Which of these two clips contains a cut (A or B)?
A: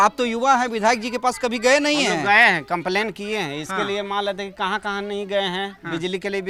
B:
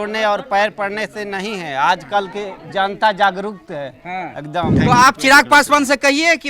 B